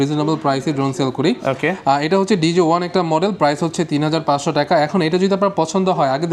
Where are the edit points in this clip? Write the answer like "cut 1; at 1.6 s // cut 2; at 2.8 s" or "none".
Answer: none